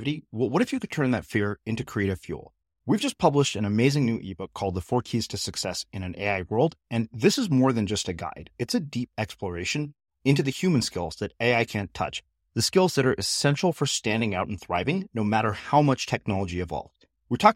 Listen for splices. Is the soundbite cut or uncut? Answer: uncut